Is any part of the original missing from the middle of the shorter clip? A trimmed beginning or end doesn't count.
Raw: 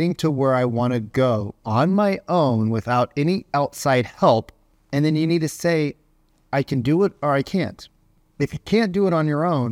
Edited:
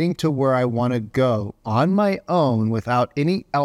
no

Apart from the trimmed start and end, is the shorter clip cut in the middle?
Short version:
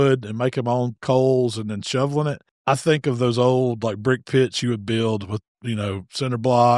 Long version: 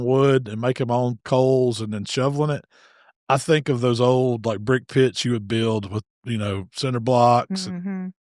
yes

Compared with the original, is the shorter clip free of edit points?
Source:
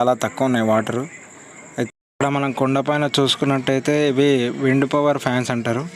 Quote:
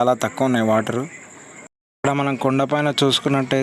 no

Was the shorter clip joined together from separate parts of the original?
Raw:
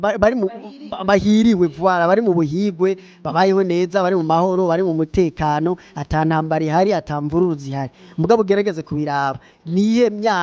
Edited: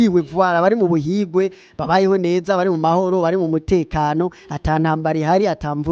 no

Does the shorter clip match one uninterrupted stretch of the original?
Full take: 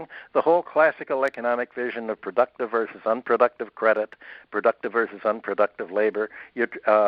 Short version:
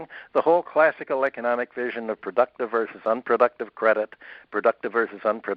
yes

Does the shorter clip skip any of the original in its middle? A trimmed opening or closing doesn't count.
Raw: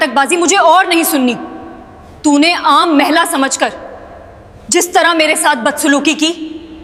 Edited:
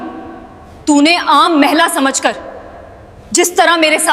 no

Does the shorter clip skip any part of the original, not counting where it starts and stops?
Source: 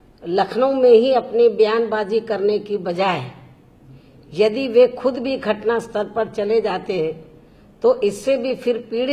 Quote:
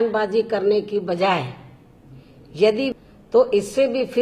yes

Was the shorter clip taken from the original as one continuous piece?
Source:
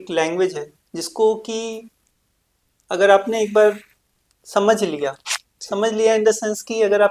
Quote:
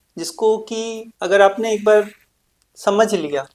no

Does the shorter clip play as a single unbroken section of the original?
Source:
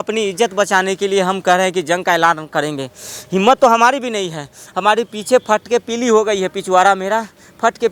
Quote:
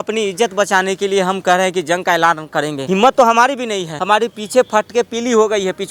no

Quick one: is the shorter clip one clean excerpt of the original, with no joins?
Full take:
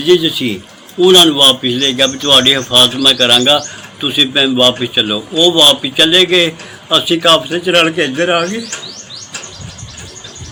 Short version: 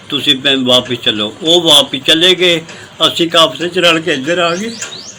yes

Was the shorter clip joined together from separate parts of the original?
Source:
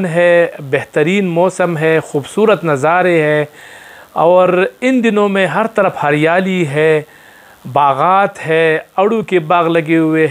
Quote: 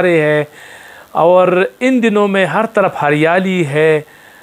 no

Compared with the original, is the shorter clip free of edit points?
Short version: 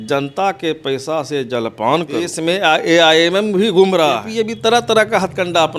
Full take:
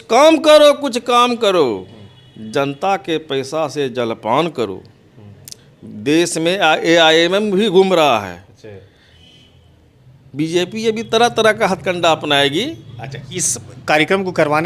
no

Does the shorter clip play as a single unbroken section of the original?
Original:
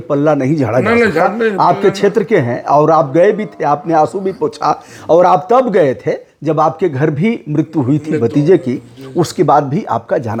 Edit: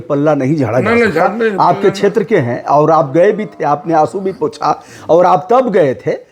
yes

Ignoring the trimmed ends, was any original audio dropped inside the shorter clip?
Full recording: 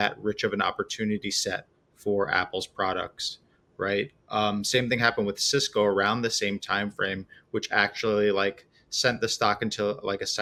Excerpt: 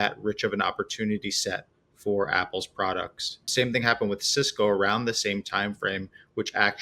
yes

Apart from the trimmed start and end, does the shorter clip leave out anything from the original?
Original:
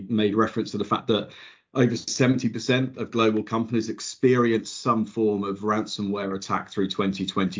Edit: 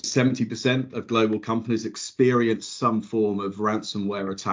no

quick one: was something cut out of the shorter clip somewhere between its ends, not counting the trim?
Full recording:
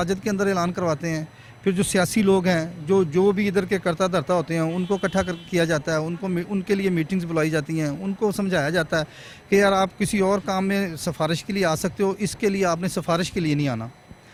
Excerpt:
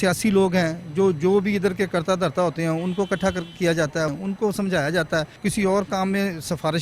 yes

